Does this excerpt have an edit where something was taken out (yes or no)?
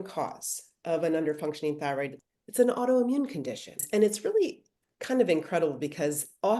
yes